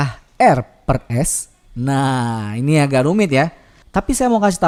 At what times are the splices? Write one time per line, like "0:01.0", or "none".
none